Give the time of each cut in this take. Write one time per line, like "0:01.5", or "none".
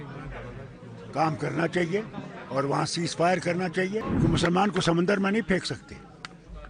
0:04.1